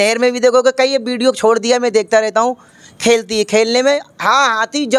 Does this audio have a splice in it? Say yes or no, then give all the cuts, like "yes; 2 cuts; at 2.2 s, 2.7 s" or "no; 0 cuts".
no; 0 cuts